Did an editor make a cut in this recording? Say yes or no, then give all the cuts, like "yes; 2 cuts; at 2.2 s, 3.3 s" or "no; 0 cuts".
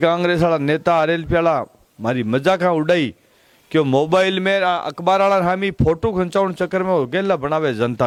no; 0 cuts